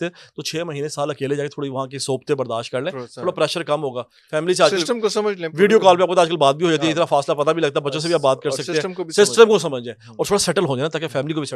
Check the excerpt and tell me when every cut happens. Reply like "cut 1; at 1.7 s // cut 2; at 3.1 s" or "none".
none